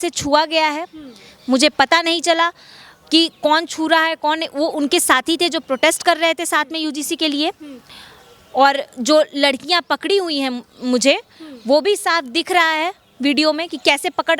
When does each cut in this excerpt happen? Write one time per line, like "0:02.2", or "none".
none